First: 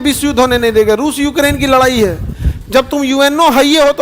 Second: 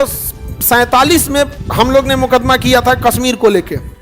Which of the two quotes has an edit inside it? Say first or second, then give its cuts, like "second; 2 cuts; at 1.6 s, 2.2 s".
second; 1 cut; at 1.6 s